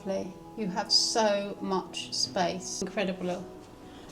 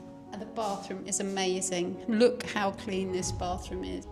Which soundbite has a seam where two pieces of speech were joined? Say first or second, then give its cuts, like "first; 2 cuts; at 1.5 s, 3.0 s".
first; 1 cut; at 2.8 s